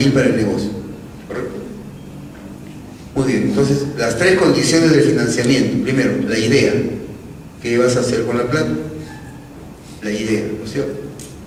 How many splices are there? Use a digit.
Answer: 0